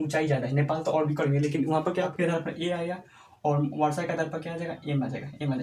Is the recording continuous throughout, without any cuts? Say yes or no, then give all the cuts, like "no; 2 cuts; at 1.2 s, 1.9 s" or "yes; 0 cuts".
no; 1 cut; at 2.1 s